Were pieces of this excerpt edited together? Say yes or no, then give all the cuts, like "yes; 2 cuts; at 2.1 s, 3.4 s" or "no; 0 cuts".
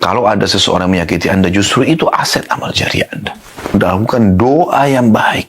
yes; 1 cut; at 3.7 s